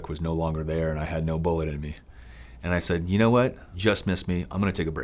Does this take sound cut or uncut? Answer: cut